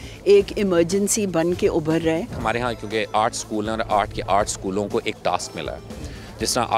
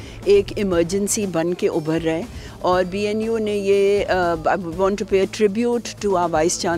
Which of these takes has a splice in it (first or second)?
first